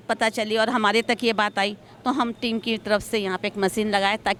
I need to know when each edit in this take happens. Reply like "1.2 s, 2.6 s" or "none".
none